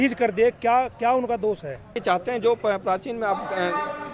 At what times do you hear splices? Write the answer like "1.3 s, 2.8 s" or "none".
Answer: 1.9 s